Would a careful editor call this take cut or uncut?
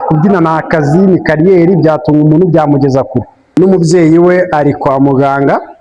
cut